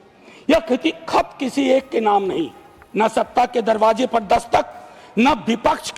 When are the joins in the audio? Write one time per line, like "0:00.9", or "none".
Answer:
none